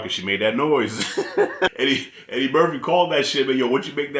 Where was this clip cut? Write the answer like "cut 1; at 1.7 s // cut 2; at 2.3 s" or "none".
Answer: cut 1; at 1.7 s